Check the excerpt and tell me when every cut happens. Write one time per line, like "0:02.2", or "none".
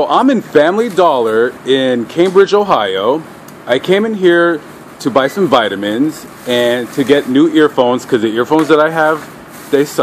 none

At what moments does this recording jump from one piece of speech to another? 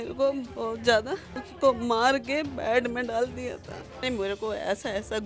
0:01.4
0:04.0

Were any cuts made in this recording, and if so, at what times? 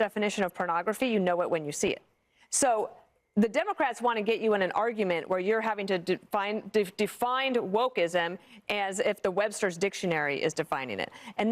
0:02.4

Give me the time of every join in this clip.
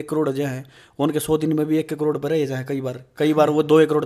none

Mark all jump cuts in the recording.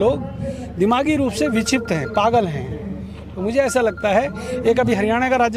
none

